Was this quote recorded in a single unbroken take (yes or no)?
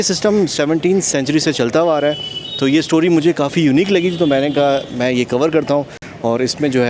yes